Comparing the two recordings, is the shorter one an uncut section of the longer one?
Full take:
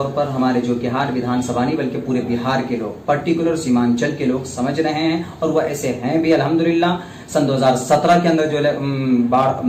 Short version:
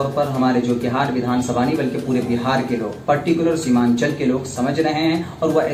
yes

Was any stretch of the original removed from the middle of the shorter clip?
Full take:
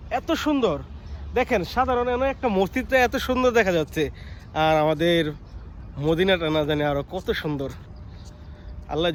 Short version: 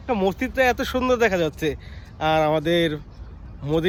no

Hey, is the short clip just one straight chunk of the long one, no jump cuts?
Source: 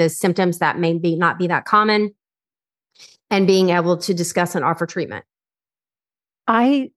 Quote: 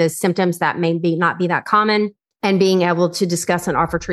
no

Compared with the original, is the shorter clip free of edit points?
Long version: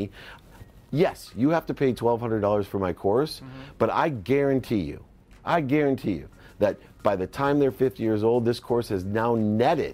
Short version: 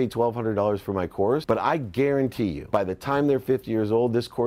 no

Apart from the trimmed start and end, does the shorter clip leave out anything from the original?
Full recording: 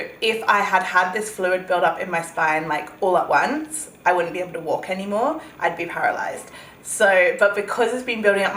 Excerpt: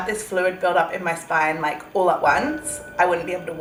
no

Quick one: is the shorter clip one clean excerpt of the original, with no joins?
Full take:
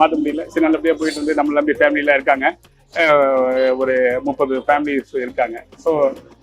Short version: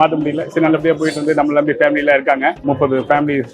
no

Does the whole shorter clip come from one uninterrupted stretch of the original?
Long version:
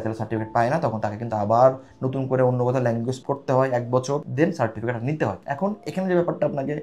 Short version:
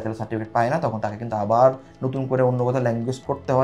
yes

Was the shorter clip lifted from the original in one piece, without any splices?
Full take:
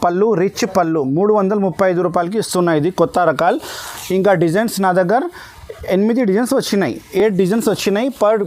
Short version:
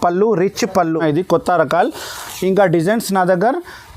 no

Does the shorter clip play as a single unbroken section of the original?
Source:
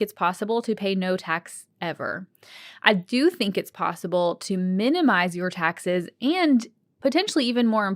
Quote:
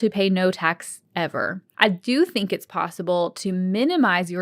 no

